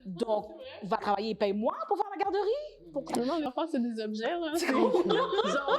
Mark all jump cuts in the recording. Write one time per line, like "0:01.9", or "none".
0:03.5